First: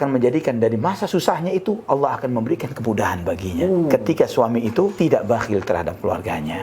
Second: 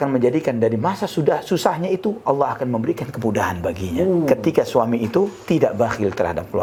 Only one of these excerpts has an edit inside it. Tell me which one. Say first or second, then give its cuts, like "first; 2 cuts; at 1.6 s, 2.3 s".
first; 2 cuts; at 1.1 s, 4.9 s